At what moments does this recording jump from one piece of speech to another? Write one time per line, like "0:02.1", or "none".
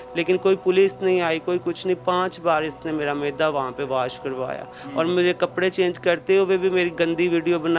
none

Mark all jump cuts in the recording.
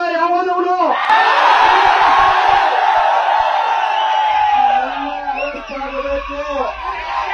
0:01.0

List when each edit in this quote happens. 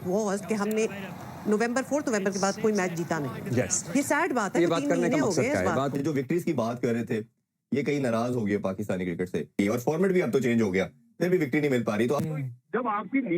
0:05.9
0:09.4

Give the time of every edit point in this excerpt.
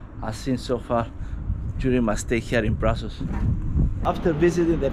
0:04.0

